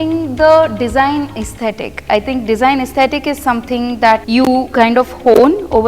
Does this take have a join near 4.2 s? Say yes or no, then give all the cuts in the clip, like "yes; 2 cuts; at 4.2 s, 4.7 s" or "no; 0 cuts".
yes; 1 cut; at 4.2 s